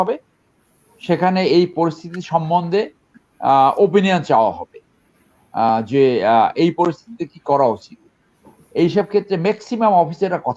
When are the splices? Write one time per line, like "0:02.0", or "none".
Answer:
none